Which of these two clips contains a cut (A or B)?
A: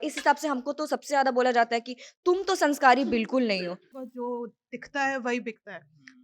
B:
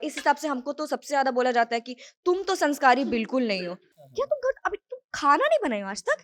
A